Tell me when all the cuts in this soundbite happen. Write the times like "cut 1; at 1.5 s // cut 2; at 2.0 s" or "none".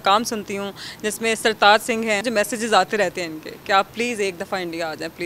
cut 1; at 2.2 s